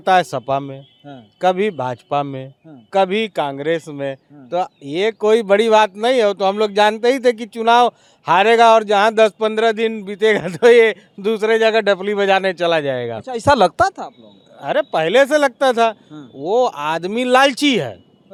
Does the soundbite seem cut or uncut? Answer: uncut